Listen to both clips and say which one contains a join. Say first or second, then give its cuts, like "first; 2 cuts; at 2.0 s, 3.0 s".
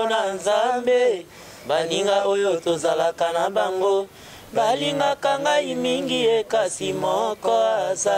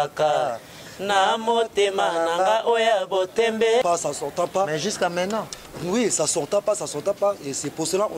second; 1 cut; at 3.8 s